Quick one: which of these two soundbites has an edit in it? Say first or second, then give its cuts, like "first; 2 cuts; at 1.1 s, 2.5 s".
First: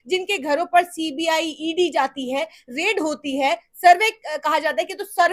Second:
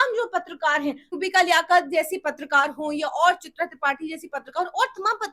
second; 1 cut; at 1.1 s